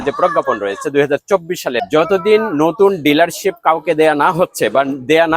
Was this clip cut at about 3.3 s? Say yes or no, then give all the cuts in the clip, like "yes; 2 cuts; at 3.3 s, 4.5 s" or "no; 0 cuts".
no; 1 cut; at 1.8 s